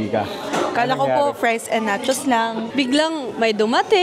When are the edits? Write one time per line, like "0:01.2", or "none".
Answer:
0:02.6